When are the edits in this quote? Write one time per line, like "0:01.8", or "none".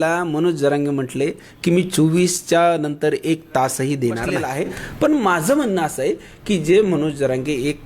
0:04.5